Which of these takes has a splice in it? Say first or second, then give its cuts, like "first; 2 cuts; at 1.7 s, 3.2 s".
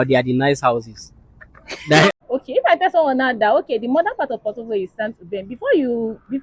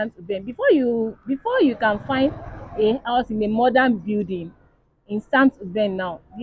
first; 1 cut; at 2.1 s